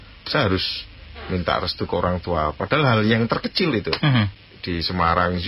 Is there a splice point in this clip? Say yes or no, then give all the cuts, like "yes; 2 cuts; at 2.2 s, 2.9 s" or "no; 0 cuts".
yes; 1 cut; at 4.4 s